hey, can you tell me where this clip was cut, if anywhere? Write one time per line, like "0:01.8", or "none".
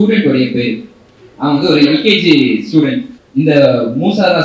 0:03.1